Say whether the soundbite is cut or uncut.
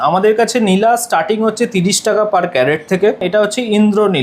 cut